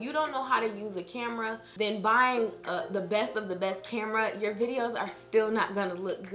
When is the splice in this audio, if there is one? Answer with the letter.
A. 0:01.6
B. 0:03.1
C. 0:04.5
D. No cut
A